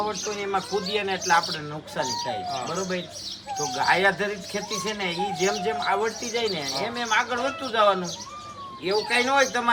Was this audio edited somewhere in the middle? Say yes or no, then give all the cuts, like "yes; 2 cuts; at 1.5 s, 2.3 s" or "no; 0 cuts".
no; 0 cuts